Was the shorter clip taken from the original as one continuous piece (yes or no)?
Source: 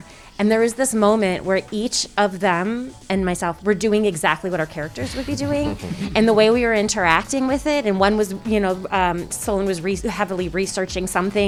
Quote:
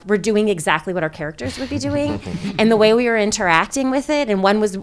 yes